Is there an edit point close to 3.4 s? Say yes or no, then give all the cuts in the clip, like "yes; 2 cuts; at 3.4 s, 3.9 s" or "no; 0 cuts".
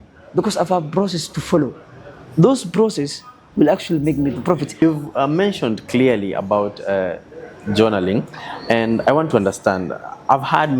no; 1 cut; at 4.8 s